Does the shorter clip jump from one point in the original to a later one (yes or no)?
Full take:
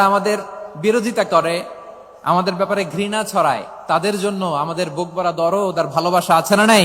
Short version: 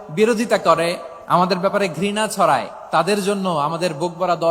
yes